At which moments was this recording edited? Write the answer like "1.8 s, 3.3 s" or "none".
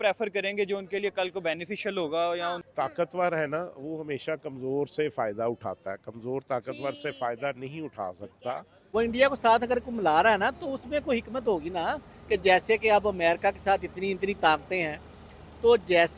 2.6 s, 8.7 s